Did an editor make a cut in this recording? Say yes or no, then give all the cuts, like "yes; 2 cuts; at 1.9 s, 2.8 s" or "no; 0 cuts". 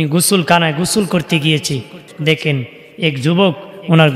yes; 1 cut; at 2.0 s